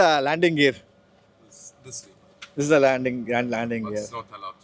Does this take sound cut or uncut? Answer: uncut